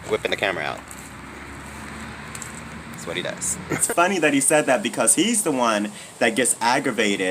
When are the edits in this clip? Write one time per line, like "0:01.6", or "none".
0:03.8